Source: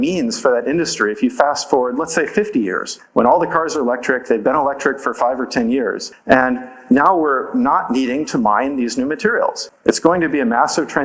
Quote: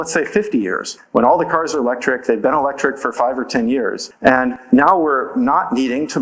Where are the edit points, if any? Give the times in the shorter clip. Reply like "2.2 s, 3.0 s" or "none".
4.3 s